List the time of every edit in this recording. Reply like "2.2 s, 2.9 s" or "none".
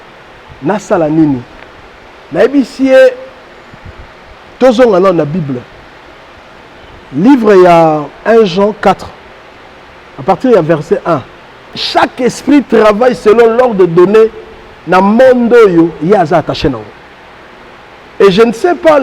11.8 s

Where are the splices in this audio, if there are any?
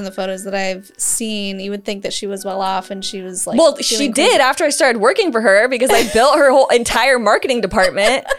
none

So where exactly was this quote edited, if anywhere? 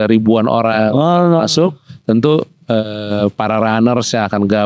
none

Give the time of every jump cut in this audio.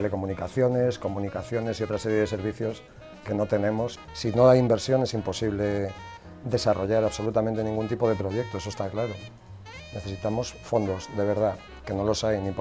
4.0 s

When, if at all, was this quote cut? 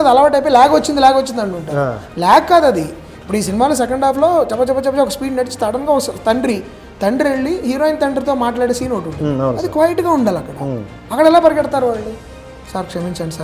none

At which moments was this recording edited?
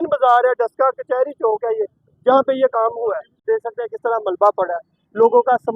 none

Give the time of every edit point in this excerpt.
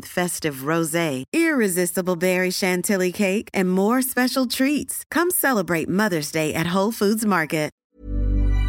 7.7 s

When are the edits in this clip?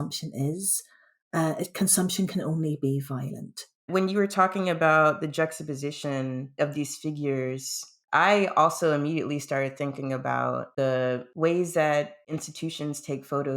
3.9 s

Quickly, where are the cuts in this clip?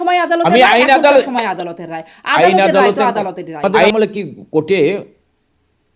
3.8 s

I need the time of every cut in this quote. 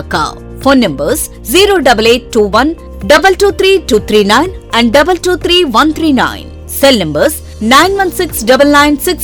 none

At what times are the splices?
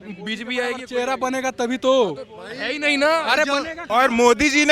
3.8 s

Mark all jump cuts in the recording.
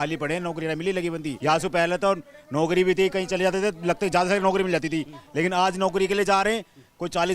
1.3 s

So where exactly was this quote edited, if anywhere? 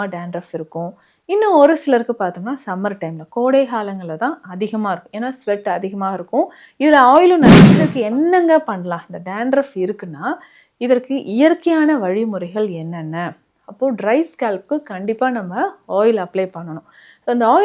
7.7 s

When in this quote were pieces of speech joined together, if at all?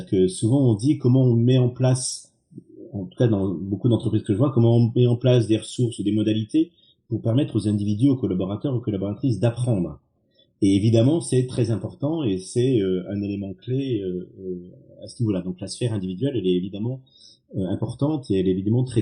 none

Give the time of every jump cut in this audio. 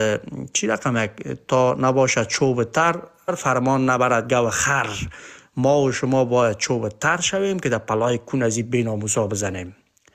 3.3 s

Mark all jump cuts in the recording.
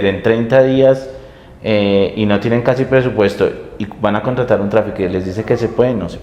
none

